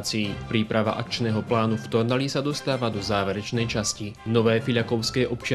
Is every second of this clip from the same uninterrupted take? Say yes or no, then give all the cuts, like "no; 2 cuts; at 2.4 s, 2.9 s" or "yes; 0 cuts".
no; 1 cut; at 4.2 s